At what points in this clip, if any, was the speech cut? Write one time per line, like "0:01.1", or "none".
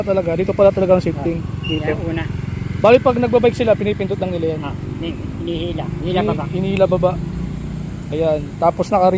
none